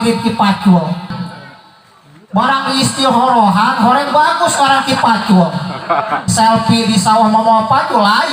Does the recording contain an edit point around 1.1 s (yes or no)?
yes